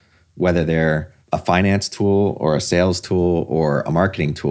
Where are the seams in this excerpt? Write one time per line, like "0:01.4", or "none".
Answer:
0:01.1